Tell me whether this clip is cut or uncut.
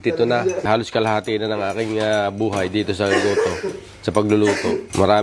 uncut